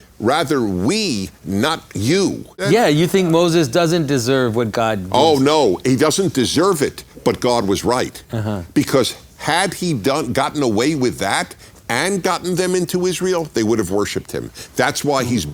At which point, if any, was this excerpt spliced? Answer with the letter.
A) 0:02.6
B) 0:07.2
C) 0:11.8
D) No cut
A